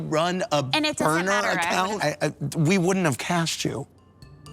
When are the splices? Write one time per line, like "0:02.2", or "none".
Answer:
none